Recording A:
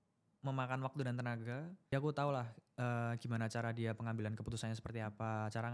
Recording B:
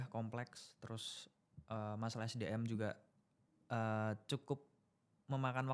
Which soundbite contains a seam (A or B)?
A